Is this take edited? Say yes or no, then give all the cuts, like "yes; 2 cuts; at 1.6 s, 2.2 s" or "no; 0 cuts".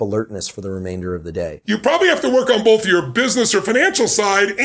yes; 1 cut; at 1.6 s